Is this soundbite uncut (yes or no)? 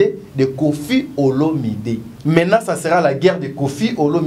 no